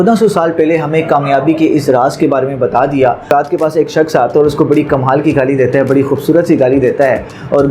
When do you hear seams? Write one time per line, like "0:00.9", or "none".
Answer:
0:03.3

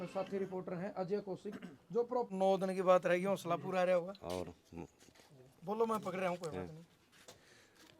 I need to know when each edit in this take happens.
0:02.3

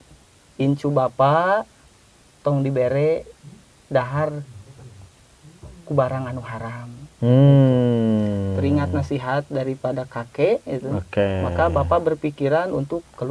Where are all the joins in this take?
none

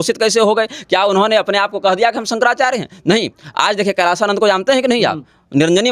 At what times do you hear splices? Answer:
none

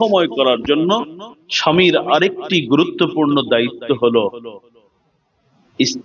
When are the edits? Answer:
none

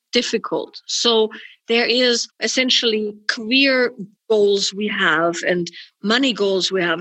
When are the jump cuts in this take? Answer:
0:02.4
0:04.1

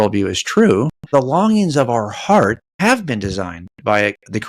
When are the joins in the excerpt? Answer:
0:01.1
0:02.7

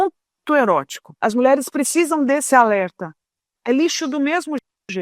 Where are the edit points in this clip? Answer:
0:01.2

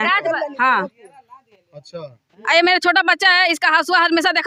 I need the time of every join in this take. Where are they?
none

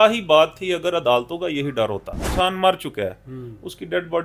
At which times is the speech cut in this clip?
0:02.3

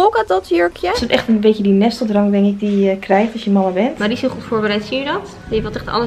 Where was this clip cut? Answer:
0:01.0
0:04.0

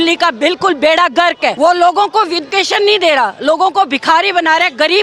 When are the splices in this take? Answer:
0:01.6
0:02.4

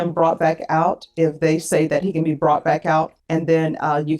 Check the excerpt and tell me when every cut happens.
0:03.2

